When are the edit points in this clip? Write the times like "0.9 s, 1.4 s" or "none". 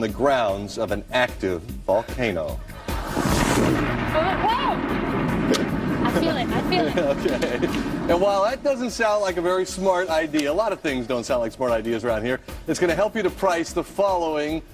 1.1 s